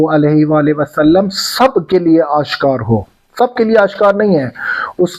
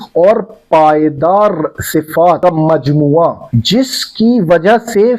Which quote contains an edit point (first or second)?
second